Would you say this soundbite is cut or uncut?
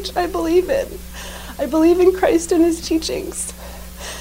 uncut